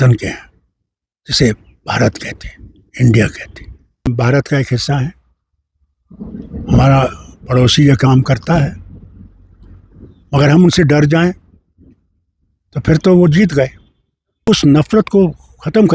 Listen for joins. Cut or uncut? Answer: cut